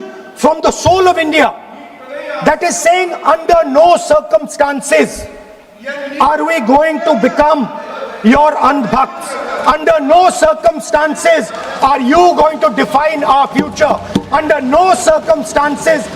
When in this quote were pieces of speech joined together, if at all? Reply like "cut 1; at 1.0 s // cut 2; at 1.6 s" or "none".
none